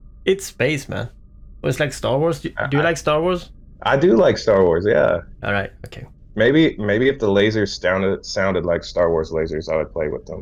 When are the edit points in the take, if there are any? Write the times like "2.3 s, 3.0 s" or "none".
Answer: none